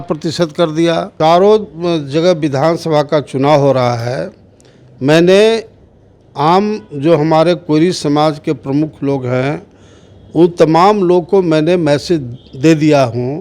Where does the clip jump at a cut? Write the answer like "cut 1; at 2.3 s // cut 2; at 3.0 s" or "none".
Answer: cut 1; at 1.1 s